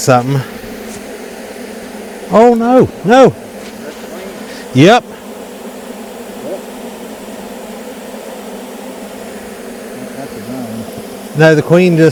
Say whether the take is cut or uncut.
uncut